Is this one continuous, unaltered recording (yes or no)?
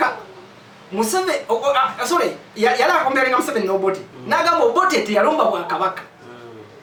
yes